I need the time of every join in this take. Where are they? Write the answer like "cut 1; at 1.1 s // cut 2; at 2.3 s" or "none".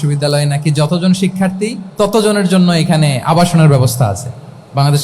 cut 1; at 1.8 s